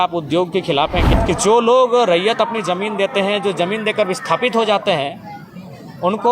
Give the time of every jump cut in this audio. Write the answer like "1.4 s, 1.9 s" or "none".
1.1 s